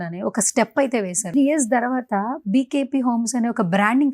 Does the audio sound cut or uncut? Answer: cut